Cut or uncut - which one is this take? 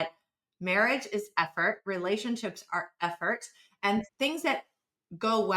cut